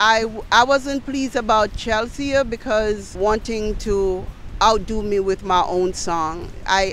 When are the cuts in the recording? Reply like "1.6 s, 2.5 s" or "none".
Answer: 3.1 s